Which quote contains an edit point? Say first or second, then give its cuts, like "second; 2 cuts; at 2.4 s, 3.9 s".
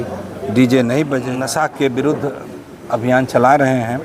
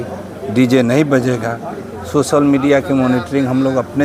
first; 1 cut; at 1.4 s